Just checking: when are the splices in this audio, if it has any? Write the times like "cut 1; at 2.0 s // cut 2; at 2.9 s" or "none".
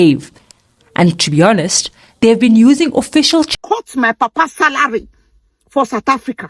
cut 1; at 3.6 s